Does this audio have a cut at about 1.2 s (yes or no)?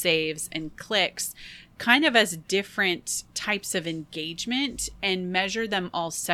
no